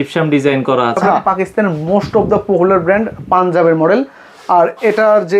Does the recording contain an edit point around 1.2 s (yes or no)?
yes